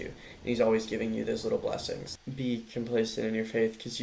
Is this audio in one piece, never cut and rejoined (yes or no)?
no